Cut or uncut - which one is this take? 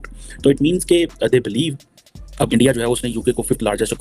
uncut